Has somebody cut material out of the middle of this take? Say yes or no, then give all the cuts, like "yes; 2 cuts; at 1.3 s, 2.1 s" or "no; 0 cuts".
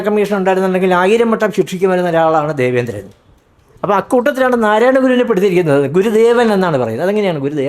no; 0 cuts